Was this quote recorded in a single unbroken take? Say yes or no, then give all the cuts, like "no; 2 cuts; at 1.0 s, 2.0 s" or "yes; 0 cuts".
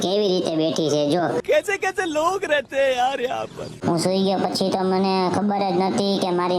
no; 1 cut; at 3.8 s